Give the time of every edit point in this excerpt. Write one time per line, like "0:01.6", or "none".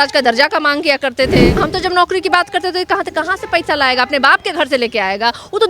0:01.6